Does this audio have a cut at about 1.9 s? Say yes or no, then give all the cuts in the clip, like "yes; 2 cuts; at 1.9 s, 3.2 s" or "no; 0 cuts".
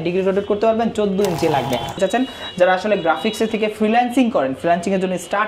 yes; 1 cut; at 1.9 s